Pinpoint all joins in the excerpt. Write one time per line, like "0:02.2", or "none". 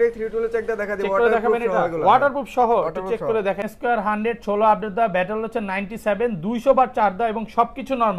0:03.7